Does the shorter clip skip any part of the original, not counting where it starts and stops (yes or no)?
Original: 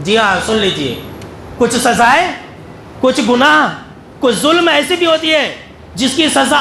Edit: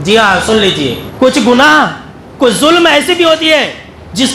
yes